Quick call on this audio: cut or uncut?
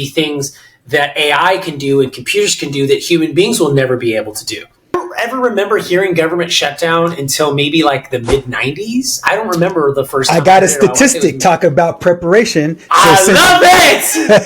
cut